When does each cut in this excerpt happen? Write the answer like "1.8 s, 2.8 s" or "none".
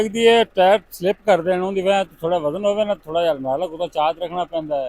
none

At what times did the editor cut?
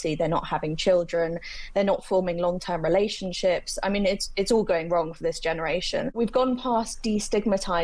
6.1 s

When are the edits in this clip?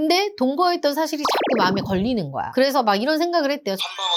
none

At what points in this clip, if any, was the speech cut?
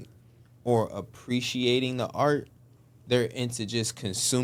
none

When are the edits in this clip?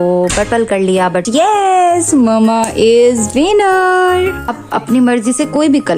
1.3 s, 4.6 s

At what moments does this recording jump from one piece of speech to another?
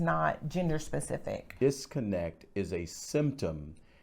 1.5 s

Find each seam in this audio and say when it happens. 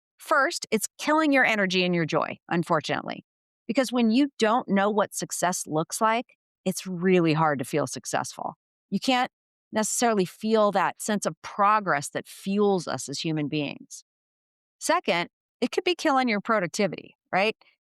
11.0 s

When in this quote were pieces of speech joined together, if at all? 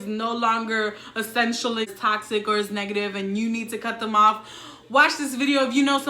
1.9 s

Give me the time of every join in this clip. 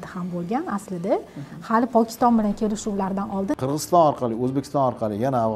3.6 s

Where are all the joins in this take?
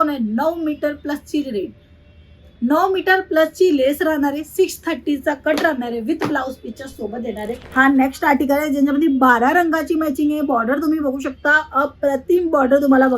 7.6 s

